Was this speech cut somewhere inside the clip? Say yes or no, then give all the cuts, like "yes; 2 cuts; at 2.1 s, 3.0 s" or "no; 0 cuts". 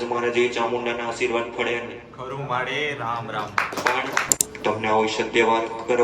yes; 1 cut; at 4.3 s